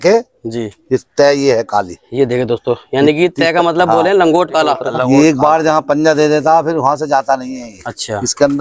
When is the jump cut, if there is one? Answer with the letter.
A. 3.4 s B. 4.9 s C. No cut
B